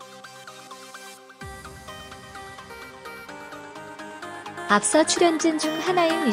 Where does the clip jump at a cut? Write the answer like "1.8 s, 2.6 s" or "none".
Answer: 2.6 s, 4.7 s